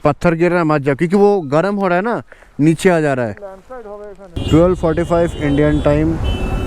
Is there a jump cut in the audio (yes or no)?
yes